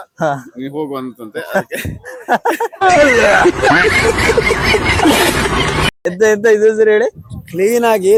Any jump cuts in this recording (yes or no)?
no